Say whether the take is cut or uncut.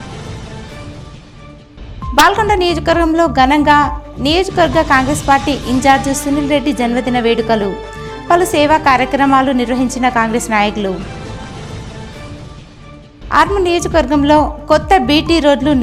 cut